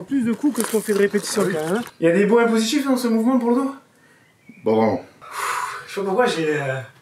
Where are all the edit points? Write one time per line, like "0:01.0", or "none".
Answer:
0:01.9
0:05.1

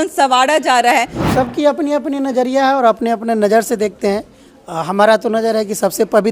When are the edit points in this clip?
0:01.2

